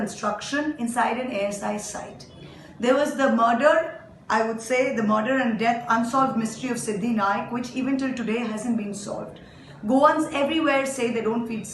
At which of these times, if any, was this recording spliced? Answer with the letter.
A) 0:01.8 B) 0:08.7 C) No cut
B